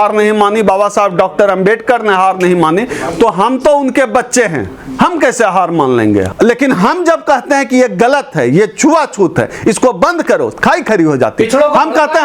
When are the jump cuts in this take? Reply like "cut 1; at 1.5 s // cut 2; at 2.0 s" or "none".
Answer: cut 1; at 6.3 s